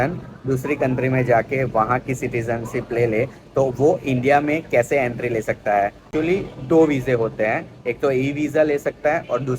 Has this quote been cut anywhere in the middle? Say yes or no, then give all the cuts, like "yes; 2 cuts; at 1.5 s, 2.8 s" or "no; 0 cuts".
yes; 1 cut; at 6.1 s